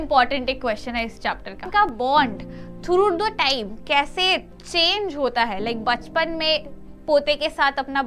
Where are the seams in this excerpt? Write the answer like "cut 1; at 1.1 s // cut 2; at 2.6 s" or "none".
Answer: cut 1; at 1.6 s